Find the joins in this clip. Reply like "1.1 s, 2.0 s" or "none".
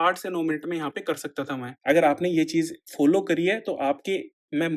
1.7 s